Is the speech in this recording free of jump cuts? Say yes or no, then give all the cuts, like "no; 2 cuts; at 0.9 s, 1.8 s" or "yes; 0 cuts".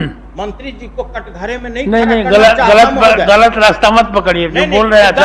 yes; 0 cuts